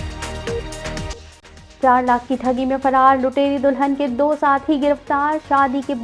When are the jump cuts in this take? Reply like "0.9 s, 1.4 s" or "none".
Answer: 1.1 s